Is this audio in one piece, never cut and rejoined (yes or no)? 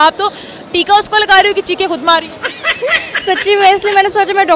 yes